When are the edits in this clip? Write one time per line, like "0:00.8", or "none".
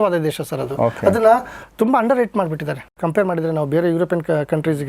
0:03.0

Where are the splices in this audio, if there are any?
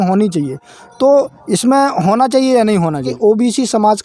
0:03.1

